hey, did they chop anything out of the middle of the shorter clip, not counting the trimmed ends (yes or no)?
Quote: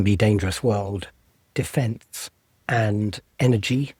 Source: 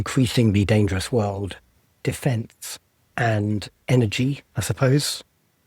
no